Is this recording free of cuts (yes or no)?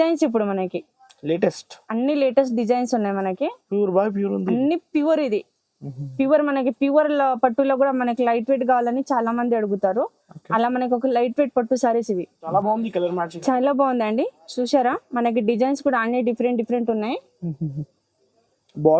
no